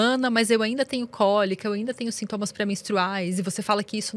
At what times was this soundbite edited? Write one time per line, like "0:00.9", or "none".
none